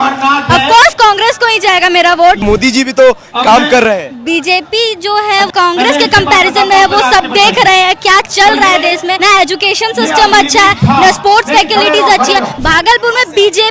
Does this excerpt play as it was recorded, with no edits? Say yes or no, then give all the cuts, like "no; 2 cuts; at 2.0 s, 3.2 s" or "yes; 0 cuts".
no; 4 cuts; at 2.4 s, 5.5 s, 9.2 s, 12.5 s